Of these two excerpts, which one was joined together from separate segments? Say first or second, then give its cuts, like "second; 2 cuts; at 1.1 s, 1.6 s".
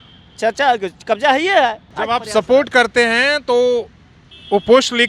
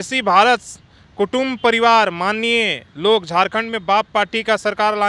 first; 1 cut; at 1.9 s